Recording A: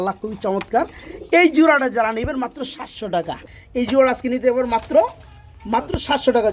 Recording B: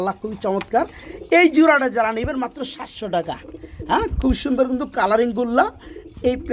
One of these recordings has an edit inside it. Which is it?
A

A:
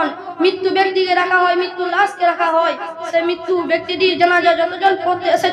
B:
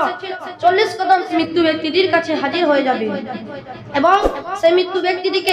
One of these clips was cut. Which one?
B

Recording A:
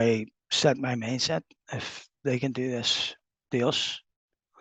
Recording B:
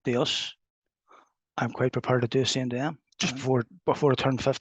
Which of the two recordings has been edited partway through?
B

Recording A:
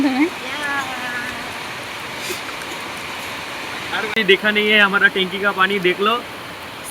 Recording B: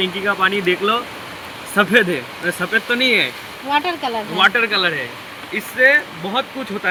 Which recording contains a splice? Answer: A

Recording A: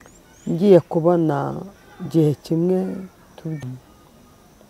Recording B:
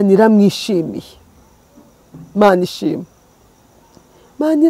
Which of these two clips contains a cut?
A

